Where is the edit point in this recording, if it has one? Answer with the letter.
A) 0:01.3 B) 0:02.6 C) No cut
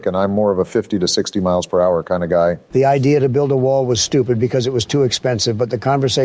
B